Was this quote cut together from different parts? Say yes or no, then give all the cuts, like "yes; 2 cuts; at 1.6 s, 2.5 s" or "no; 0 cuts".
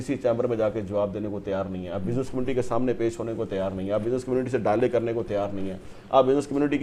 no; 0 cuts